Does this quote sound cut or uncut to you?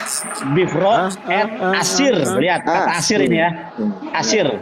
uncut